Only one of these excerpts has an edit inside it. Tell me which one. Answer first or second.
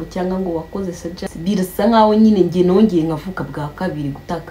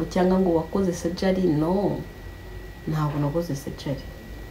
first